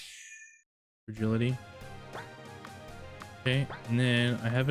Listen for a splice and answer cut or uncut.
uncut